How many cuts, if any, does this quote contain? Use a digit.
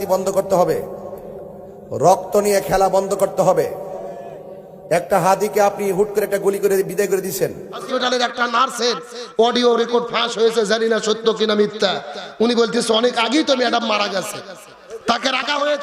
1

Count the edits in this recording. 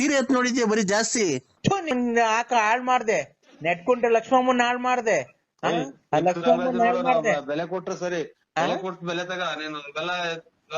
1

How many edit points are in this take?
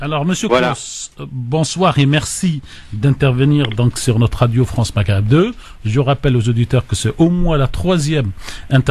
1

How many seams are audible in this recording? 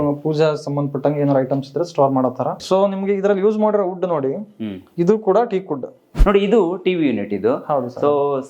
2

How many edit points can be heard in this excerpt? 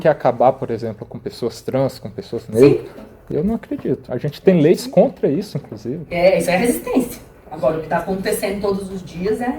0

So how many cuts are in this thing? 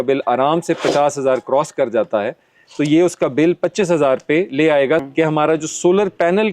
1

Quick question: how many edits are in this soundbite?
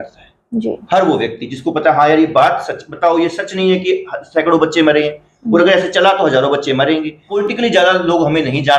1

